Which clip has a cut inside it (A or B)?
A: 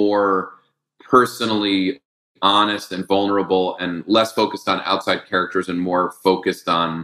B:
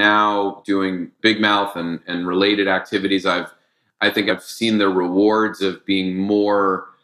B